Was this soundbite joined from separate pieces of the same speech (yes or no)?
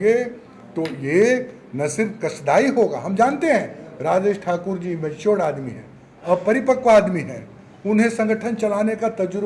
no